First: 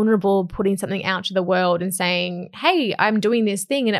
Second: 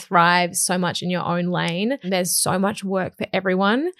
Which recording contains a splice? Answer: second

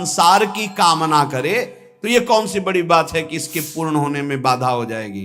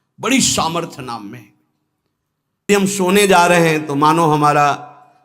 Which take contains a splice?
second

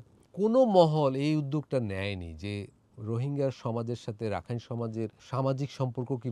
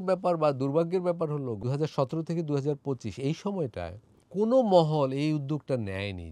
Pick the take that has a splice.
second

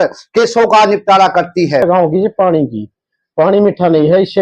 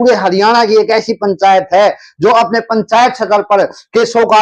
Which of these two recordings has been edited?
first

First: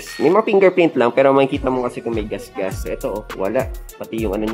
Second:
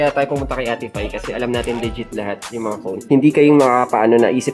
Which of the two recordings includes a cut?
first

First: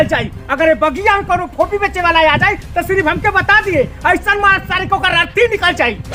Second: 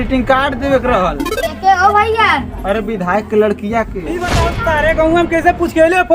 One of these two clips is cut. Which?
second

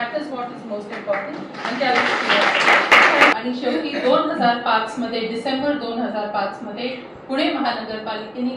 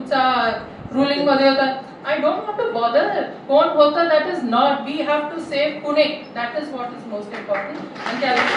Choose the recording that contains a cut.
first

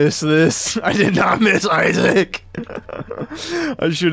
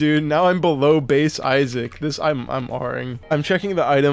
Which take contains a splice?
second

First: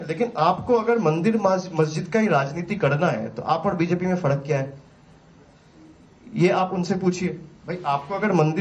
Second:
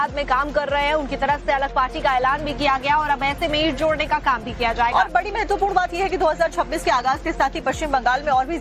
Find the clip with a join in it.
first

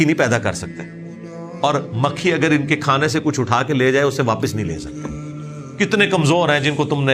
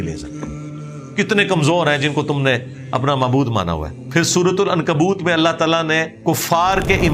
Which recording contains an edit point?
second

